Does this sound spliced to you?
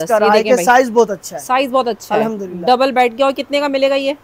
no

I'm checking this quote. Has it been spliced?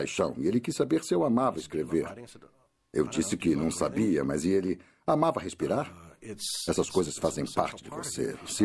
yes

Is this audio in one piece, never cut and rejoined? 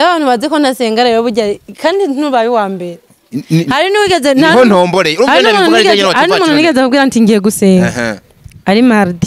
yes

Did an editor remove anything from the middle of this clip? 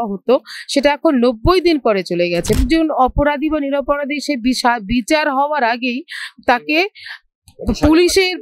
yes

